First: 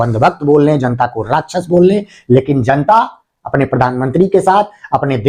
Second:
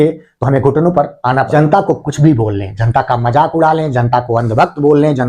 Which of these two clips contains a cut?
second; 1 cut; at 1.5 s

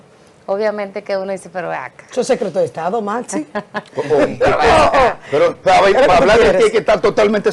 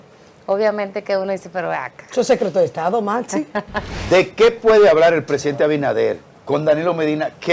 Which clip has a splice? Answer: second; 2 cuts; at 3.8 s, 6.3 s

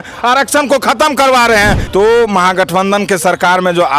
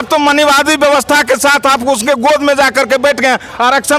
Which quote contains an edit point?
first; 1 cut; at 1.8 s

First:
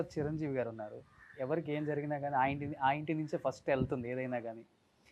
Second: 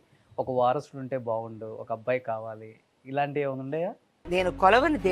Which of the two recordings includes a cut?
second; 1 cut; at 4.1 s

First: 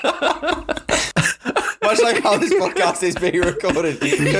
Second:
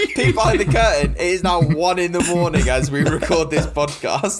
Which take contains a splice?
first; 1 cut; at 1.3 s

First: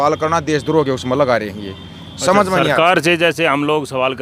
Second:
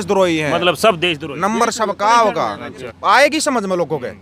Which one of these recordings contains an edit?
second; 1 cut; at 2.9 s

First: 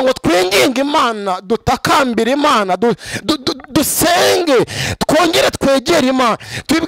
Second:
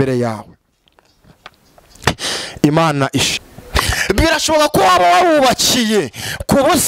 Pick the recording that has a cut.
second; 1 cut; at 3.3 s

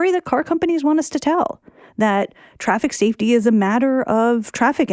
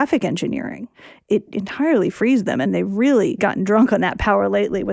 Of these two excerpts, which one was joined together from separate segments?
second; 3 cuts; at 1.3 s, 2.7 s, 3.4 s

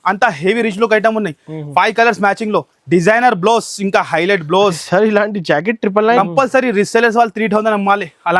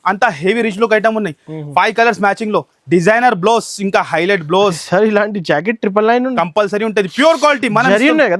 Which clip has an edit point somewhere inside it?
first; 1 cut; at 6.2 s

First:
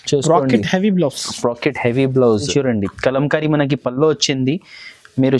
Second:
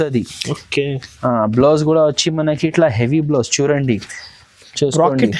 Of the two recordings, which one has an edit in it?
first; 1 cut; at 2.5 s

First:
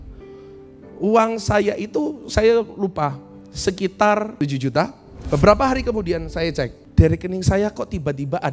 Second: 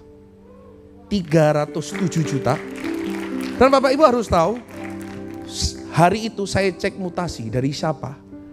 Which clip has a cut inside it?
first; 2 cuts; at 4.6 s, 6.8 s

